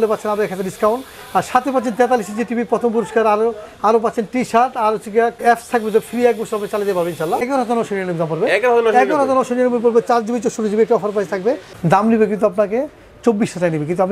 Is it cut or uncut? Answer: cut